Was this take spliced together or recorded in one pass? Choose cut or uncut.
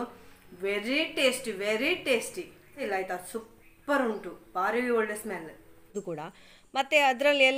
cut